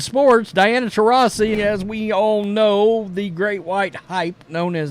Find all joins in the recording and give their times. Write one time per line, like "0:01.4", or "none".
0:01.5